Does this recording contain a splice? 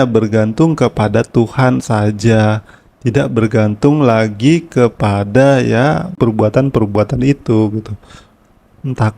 yes; 1 cut; at 6.2 s

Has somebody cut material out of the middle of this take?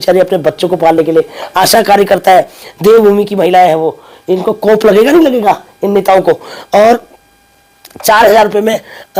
no; 0 cuts

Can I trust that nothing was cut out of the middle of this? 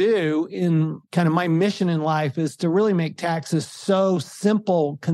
no; 1 cut; at 1.0 s

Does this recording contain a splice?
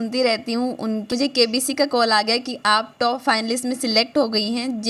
yes; 1 cut; at 1.1 s

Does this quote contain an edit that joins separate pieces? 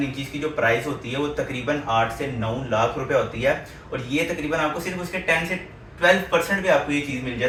no; 0 cuts

